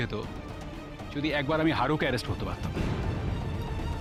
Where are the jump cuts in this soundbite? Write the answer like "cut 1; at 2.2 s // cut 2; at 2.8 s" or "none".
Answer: none